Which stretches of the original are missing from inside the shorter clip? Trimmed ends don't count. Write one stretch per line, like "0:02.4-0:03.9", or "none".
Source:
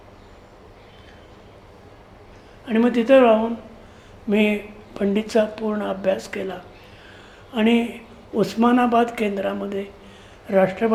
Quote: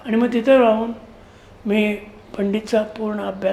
none